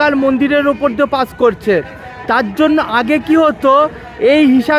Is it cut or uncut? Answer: uncut